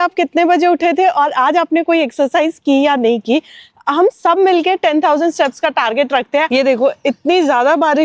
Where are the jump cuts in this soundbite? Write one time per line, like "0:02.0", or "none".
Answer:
none